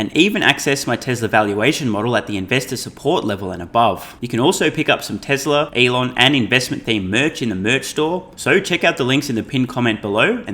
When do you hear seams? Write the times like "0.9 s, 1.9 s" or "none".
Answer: 4.1 s, 5.7 s, 8.3 s